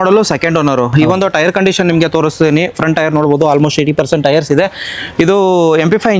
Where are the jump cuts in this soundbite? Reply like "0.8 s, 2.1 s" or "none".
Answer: none